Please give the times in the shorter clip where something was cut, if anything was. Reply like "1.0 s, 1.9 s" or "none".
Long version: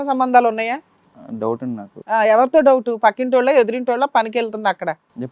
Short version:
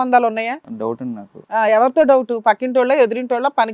1.1 s